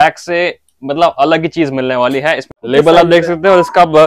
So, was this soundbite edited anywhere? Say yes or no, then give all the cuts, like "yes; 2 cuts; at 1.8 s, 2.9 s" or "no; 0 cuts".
yes; 1 cut; at 2.6 s